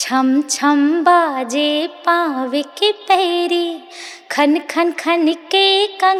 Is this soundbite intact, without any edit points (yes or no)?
yes